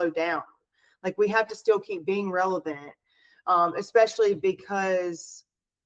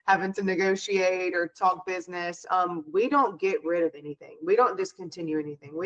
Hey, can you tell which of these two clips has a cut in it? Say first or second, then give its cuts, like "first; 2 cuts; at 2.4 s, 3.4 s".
second; 1 cut; at 2.4 s